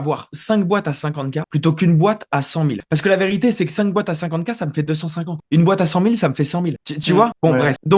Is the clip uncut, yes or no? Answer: yes